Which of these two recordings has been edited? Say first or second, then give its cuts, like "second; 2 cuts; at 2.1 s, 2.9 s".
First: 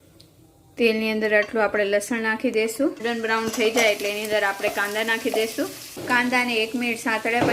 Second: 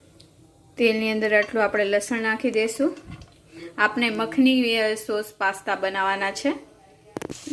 first; 2 cuts; at 3.0 s, 6.0 s